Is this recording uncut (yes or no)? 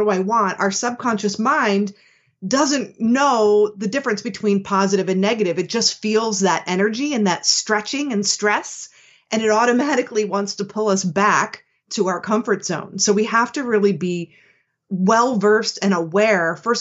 yes